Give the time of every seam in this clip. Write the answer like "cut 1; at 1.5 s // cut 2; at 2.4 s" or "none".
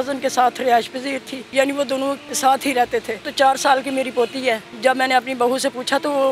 cut 1; at 1.3 s // cut 2; at 2.3 s // cut 3; at 3.3 s // cut 4; at 4.7 s